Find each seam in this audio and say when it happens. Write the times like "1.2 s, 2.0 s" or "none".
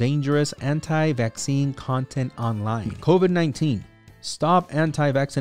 2.9 s